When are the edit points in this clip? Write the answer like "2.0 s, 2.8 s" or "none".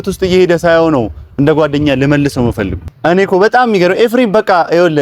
2.8 s

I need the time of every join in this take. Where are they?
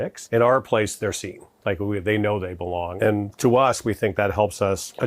2.9 s

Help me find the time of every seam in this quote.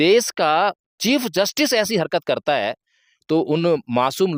none

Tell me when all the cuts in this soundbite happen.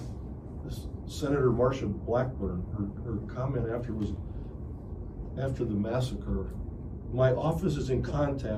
none

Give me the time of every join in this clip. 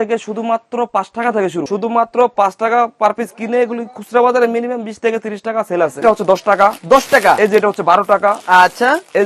1.6 s, 6.0 s

